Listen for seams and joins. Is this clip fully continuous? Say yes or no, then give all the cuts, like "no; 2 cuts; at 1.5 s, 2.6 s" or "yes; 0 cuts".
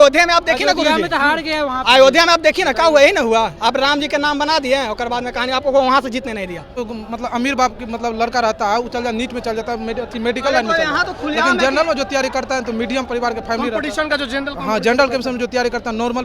no; 1 cut; at 6.9 s